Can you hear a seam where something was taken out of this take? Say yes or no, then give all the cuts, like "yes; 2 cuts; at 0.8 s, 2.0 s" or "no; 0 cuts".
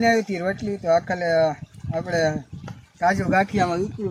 no; 0 cuts